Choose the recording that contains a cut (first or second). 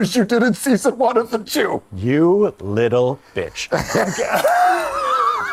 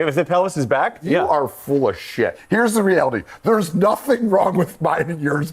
second